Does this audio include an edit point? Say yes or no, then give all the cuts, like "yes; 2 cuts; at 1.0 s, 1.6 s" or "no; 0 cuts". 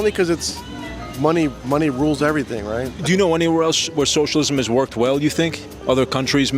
yes; 1 cut; at 3.0 s